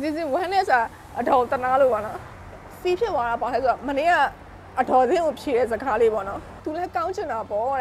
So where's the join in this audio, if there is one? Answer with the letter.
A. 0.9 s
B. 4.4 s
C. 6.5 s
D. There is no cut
C